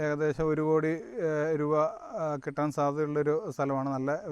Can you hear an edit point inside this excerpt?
no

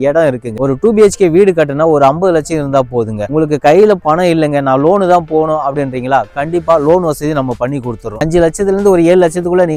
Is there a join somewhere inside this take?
no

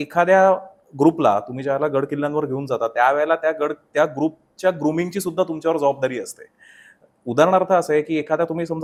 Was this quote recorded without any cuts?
yes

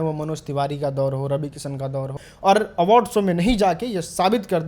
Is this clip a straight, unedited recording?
no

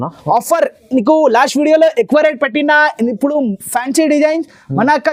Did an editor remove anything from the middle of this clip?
no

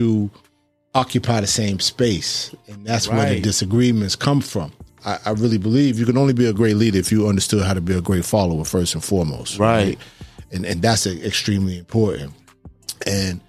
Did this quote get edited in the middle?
yes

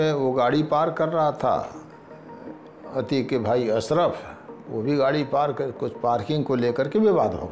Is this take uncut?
yes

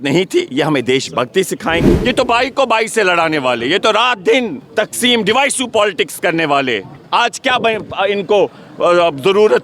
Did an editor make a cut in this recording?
yes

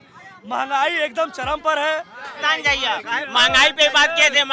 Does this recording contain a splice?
yes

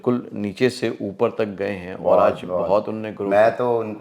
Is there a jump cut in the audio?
no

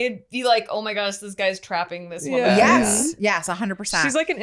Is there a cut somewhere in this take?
no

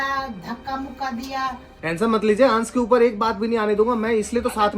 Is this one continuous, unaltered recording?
no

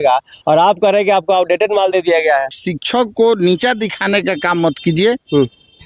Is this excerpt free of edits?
no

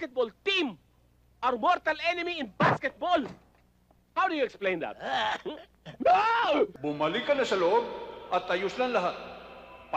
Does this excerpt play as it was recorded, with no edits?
no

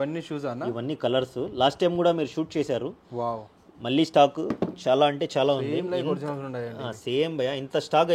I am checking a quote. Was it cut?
no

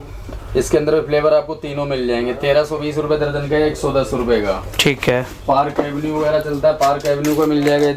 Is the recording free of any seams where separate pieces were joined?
yes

